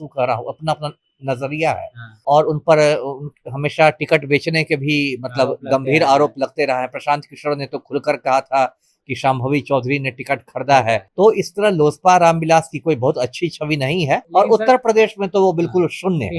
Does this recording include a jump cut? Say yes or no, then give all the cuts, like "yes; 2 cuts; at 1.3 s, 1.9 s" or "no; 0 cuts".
yes; 3 cuts; at 2.2 s, 11.1 s, 14.3 s